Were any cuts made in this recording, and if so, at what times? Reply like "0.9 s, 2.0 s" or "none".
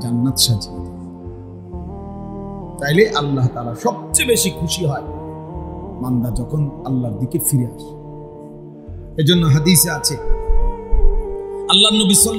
7.7 s, 9.1 s